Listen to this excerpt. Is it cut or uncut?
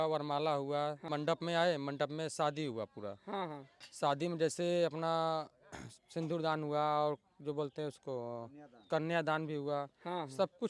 cut